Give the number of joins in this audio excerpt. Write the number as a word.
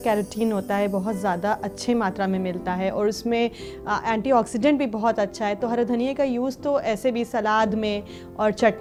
zero